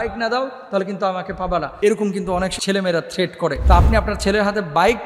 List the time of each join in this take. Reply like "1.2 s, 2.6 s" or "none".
1.7 s, 2.6 s, 3.6 s